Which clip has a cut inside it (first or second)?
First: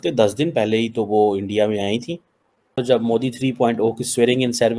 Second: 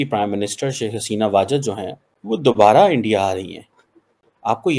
first